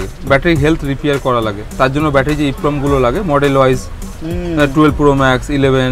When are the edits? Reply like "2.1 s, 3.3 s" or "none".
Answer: none